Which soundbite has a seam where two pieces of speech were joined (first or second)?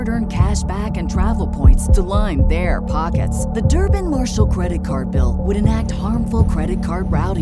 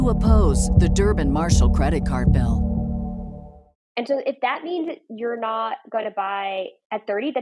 second